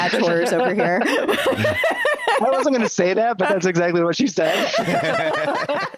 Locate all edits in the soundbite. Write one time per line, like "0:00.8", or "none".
none